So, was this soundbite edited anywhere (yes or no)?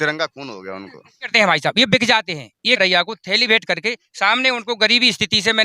yes